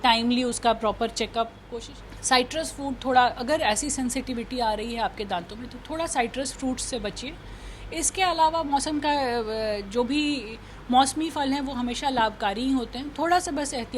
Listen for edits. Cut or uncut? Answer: cut